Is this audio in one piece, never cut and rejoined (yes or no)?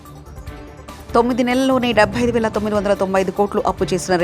no